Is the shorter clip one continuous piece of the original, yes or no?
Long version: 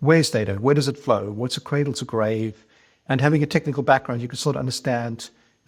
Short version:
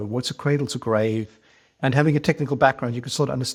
yes